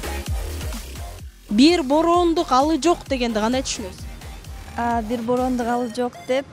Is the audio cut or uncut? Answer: cut